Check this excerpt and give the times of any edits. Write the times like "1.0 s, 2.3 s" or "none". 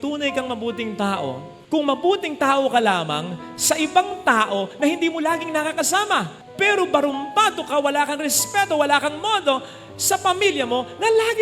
none